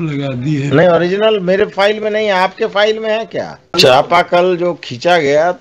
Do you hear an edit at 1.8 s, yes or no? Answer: no